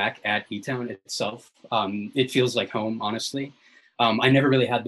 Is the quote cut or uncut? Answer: uncut